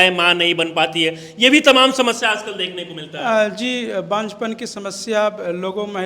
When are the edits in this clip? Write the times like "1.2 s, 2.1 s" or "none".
none